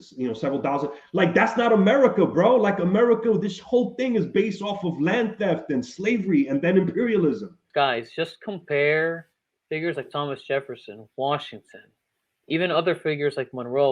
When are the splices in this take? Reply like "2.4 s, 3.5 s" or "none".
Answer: 7.5 s